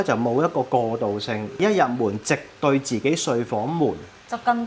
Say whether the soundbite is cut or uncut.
cut